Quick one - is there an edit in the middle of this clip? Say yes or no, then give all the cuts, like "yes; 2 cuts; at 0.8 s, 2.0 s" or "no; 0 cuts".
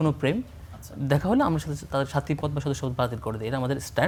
no; 0 cuts